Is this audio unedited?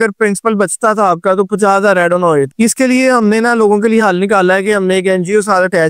yes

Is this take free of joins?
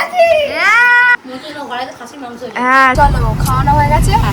no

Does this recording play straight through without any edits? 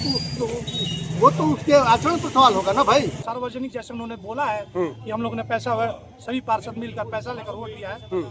no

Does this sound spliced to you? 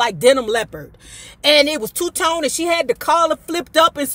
no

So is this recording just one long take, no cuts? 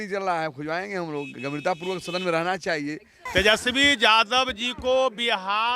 no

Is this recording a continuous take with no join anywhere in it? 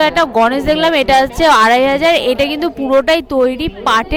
yes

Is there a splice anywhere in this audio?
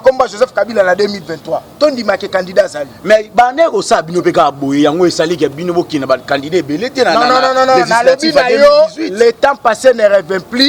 no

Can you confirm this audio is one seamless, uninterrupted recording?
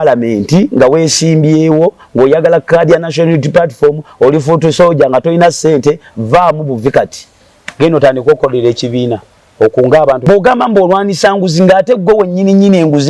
no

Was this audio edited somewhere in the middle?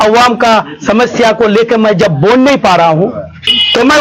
no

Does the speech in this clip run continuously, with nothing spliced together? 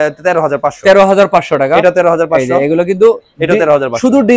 yes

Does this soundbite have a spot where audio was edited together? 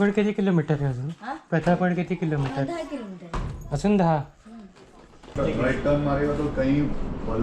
yes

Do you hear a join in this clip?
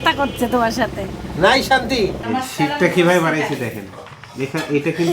yes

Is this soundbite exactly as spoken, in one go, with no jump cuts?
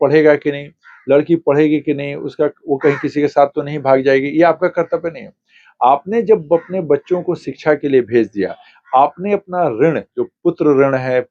yes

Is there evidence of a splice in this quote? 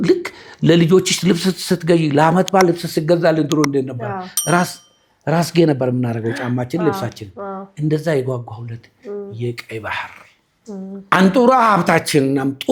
no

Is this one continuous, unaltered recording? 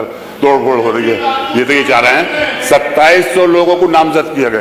yes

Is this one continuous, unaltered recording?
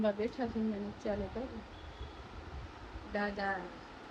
yes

